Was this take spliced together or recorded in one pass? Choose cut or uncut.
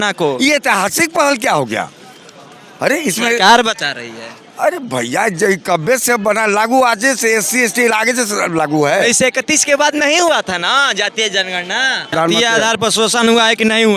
cut